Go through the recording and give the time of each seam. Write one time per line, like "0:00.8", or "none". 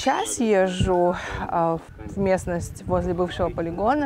0:02.0